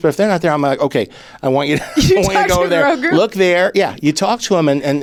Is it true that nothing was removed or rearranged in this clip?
yes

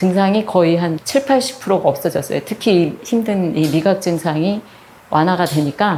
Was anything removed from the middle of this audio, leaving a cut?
no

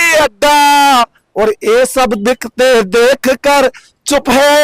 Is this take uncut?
yes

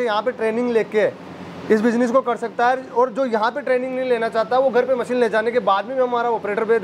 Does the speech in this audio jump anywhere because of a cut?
no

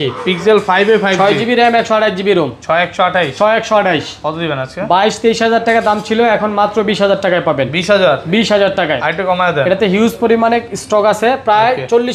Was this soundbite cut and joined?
no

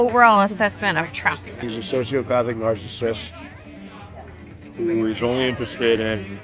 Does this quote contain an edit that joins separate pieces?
yes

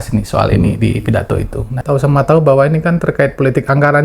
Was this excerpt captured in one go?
no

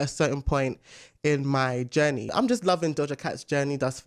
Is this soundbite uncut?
no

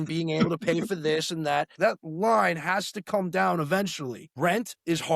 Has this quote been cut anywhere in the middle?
yes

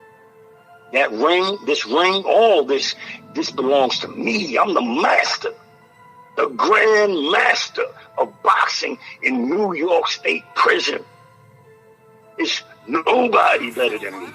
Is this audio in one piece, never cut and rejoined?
no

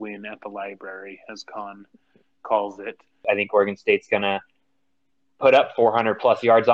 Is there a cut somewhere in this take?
yes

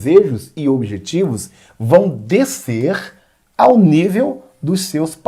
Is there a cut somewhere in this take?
no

